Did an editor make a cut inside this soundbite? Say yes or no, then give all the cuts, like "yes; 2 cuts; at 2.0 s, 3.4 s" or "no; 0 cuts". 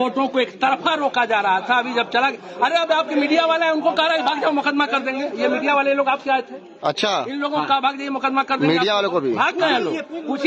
no; 0 cuts